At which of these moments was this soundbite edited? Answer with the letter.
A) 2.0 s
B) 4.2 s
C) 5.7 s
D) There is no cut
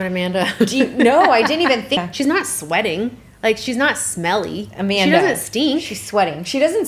A